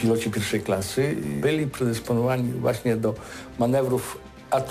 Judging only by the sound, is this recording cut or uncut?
cut